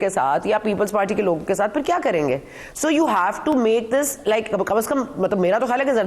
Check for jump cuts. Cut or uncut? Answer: uncut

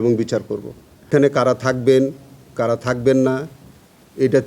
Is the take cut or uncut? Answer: cut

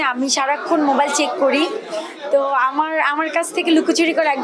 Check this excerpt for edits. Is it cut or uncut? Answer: uncut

